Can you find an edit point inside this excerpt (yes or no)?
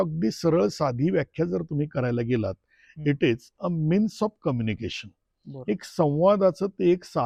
no